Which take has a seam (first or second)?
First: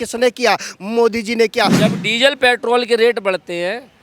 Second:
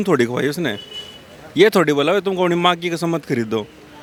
first